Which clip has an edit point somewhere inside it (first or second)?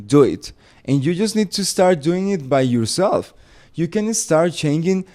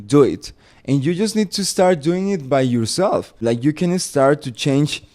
second